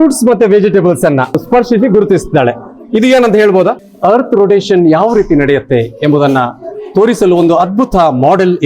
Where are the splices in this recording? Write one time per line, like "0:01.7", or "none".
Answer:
0:03.9